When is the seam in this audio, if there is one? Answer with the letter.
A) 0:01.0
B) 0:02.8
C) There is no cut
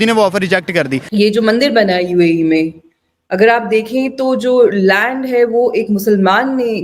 A